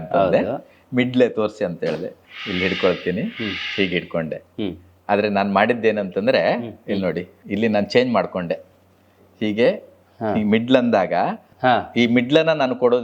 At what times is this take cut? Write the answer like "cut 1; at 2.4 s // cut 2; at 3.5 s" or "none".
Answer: cut 1; at 2.2 s // cut 2; at 7.3 s // cut 3; at 11.4 s